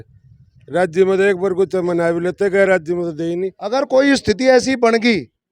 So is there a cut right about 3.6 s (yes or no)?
yes